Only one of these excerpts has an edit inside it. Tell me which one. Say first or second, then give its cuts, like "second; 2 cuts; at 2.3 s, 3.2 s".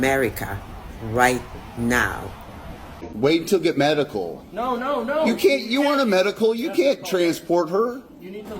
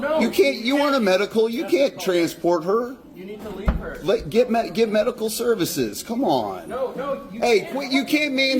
first; 1 cut; at 3.0 s